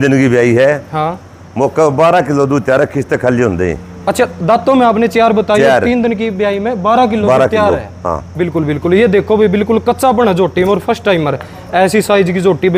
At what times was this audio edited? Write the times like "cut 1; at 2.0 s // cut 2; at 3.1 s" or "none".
none